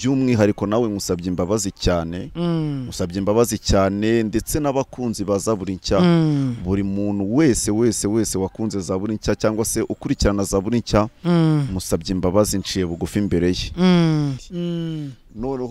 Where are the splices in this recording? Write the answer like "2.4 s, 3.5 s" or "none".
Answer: 14.5 s